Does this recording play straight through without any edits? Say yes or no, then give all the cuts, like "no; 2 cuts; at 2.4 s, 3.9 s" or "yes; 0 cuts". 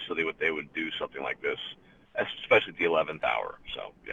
yes; 0 cuts